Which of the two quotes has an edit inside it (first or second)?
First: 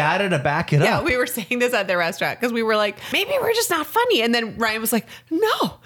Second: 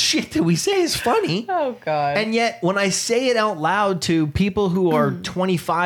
first